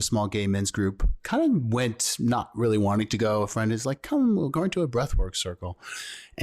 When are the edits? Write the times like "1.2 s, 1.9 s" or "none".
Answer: 1.2 s